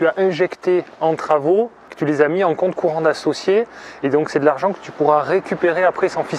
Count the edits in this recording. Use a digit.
1